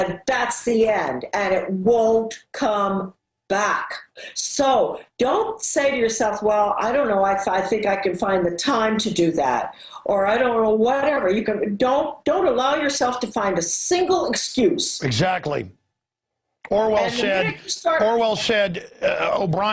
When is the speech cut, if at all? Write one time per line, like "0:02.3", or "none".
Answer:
0:11.0